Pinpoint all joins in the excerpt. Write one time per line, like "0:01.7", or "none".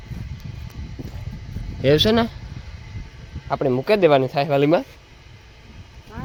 none